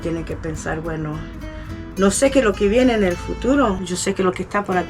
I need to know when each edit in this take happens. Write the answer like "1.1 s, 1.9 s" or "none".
3.8 s